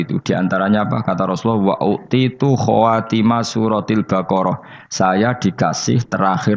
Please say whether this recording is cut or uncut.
uncut